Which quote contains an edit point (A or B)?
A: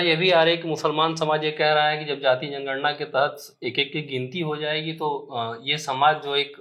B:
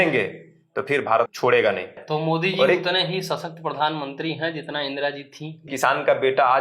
B